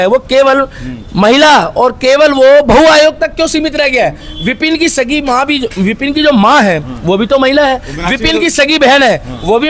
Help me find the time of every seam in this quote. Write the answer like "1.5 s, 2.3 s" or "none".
none

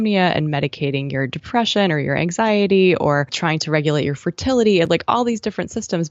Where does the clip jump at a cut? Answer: 3.3 s

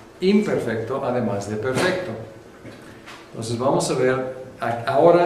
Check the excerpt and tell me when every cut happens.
none

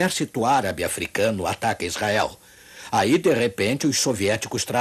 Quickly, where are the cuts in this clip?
none

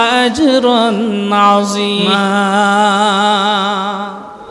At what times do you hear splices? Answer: 2.1 s

